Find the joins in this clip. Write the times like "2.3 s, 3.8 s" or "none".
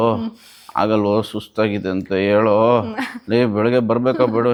none